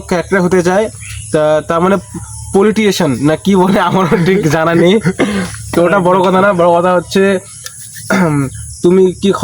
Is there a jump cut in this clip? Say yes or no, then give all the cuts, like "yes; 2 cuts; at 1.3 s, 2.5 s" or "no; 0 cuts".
yes; 1 cut; at 3.4 s